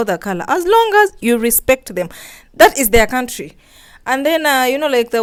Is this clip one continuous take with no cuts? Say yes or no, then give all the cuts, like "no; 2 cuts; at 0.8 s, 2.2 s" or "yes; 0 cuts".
yes; 0 cuts